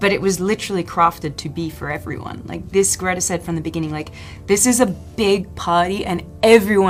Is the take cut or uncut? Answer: uncut